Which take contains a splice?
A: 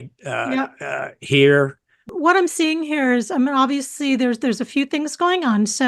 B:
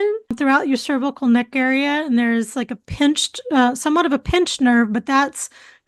A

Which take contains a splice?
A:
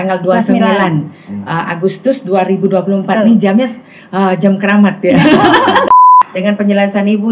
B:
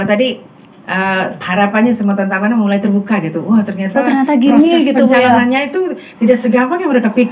A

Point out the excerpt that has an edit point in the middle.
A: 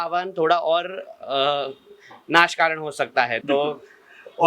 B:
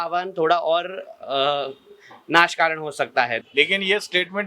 B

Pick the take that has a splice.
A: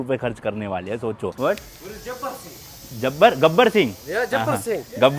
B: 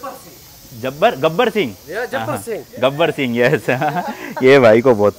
A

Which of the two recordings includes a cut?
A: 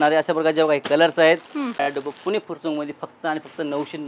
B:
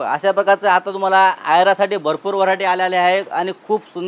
A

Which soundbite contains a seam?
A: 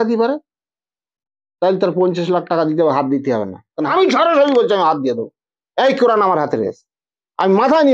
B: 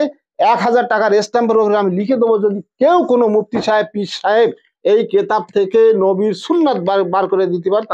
A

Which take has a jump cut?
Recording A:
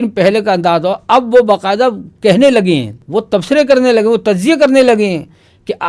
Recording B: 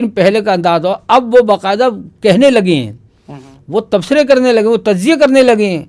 A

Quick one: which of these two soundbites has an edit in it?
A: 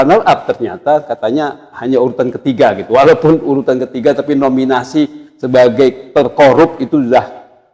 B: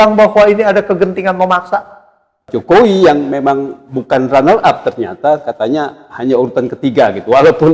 B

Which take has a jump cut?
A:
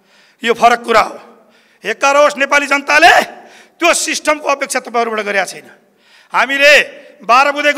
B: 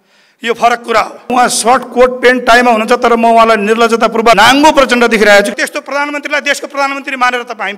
B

